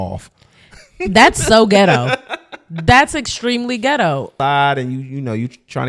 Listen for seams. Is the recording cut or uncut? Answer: cut